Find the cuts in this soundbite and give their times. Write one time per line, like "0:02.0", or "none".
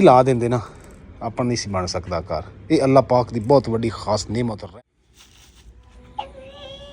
0:04.6

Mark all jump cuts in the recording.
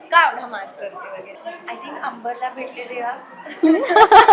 0:01.3

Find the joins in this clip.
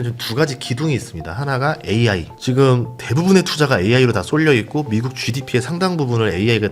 none

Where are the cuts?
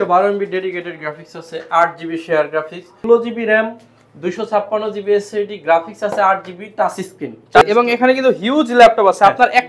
0:03.1
0:07.6

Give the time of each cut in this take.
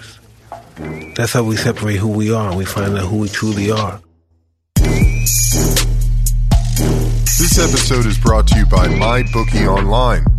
0:04.3

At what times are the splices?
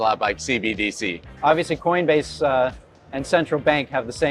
0:01.3

